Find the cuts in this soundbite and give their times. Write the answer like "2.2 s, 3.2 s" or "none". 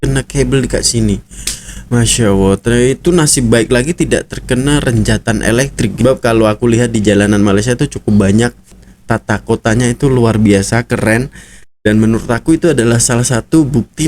5.9 s, 8.8 s